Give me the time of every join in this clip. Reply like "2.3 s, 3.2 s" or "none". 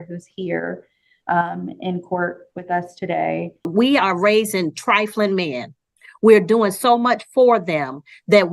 3.7 s